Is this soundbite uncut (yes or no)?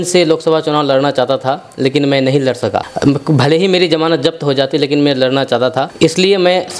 yes